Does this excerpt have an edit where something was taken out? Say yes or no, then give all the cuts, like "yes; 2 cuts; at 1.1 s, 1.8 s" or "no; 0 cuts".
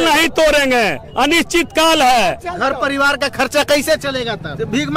no; 0 cuts